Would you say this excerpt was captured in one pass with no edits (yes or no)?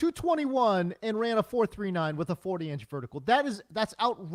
yes